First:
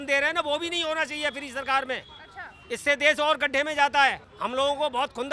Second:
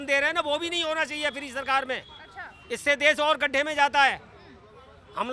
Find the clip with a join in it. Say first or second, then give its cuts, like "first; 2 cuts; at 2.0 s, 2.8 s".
first; 1 cut; at 4.3 s